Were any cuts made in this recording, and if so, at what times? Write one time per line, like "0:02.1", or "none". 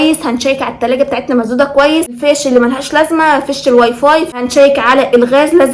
0:02.2
0:04.4